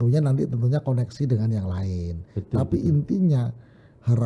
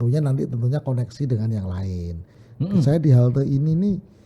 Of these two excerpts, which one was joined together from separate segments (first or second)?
second